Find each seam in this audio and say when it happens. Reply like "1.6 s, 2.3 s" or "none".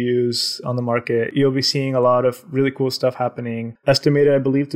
3.6 s